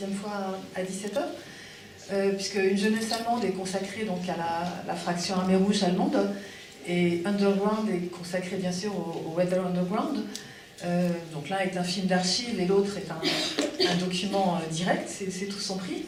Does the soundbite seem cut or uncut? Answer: uncut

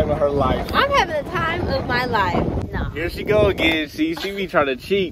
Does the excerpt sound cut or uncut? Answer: cut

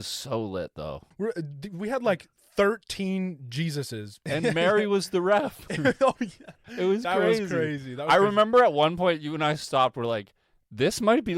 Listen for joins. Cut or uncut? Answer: cut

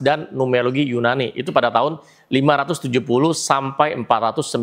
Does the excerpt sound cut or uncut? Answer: uncut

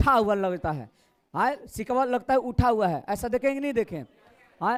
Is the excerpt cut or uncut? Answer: uncut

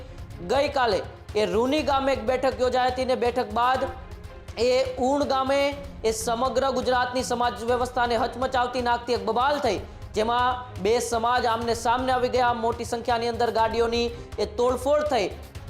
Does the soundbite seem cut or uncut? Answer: uncut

